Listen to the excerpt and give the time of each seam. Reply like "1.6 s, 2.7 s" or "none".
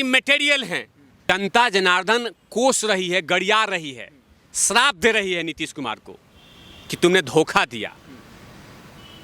1.3 s